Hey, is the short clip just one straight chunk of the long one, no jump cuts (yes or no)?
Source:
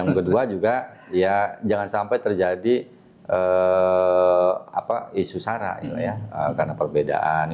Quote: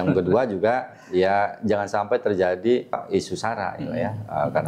no